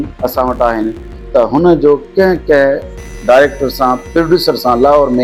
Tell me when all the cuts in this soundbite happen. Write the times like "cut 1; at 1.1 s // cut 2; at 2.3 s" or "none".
none